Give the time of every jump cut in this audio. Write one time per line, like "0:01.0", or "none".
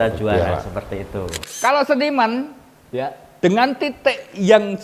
0:01.4

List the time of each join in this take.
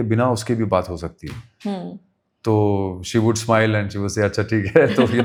none

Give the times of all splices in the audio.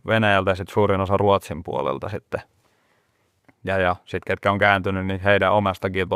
none

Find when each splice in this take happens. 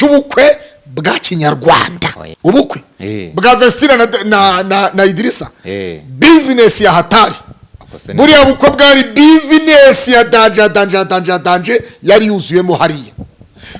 0:02.2

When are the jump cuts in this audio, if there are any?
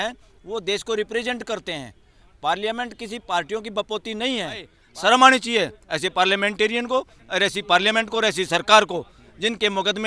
0:04.8

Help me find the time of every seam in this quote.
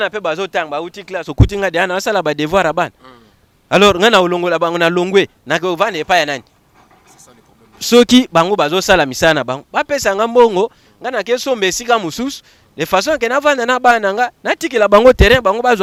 none

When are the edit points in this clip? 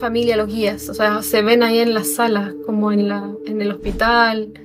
none

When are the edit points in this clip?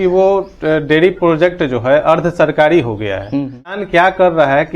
0:03.7

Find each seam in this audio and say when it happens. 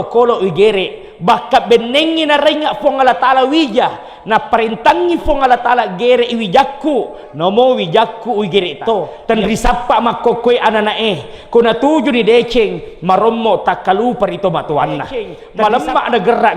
0:09.1
0:15.4

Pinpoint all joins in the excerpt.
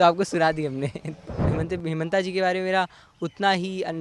0:01.4

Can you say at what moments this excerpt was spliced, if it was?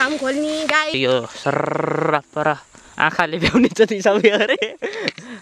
0:01.0

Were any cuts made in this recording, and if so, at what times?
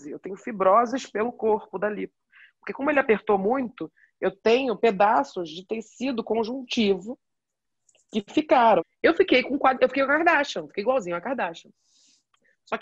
0:08.8

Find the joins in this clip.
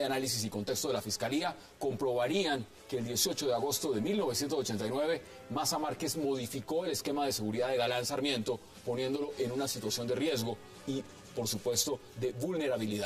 0:07.6

